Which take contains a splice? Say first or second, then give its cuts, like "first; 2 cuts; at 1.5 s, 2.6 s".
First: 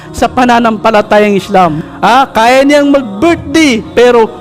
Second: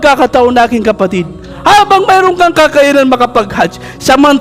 first; 1 cut; at 1.8 s